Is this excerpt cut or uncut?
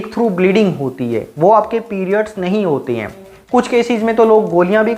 cut